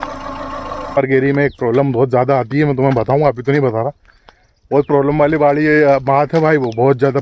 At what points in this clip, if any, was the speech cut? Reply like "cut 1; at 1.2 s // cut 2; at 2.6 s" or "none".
cut 1; at 1.0 s